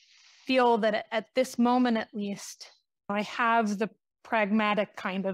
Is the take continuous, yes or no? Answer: no